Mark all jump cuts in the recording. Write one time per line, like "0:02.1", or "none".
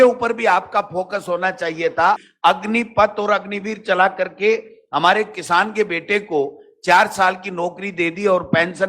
0:02.3